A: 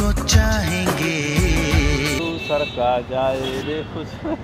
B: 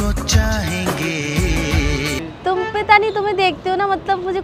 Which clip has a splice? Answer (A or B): A